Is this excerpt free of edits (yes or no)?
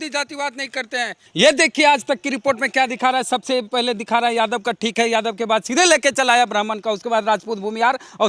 no